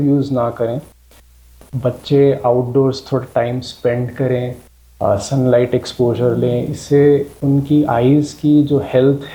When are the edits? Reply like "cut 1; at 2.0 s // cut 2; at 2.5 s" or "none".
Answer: cut 1; at 1.5 s